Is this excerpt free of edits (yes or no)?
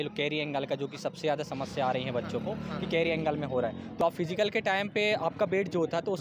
no